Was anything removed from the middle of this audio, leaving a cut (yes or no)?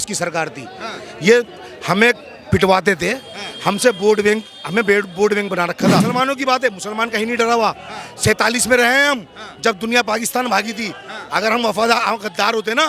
yes